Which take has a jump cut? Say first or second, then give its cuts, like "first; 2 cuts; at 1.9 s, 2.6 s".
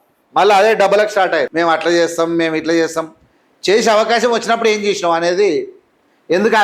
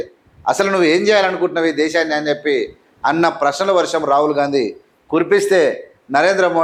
first; 1 cut; at 1.5 s